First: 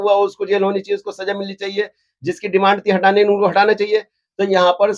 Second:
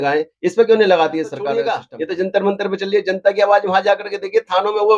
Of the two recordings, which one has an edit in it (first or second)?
second